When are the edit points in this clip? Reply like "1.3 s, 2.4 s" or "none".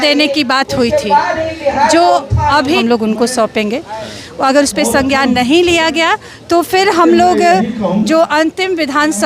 2.8 s

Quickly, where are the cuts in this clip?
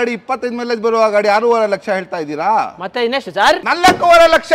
3.7 s

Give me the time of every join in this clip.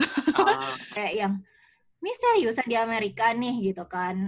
1.0 s

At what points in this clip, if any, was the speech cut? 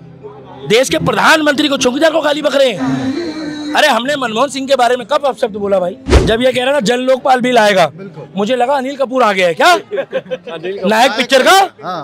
6.1 s

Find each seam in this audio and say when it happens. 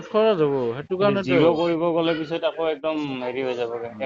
none

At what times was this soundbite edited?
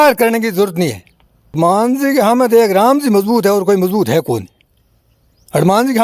1.6 s

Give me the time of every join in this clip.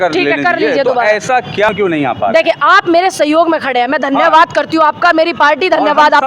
1.7 s

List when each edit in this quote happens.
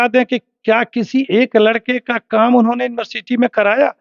none

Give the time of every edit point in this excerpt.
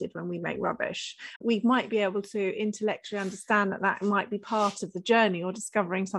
1.3 s

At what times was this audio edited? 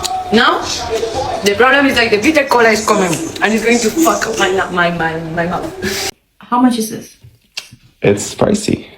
6.0 s

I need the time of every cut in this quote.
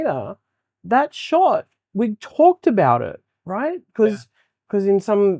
none

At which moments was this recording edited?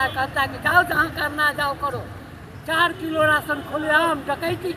none

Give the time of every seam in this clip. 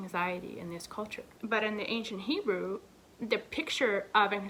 none

